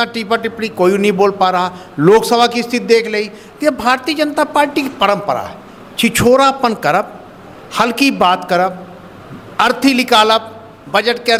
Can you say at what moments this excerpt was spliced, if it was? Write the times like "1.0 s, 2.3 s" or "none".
none